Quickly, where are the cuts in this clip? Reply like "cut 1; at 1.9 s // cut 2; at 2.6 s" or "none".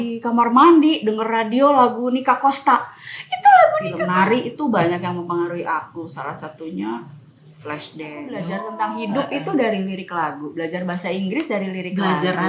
cut 1; at 3.9 s // cut 2; at 8.5 s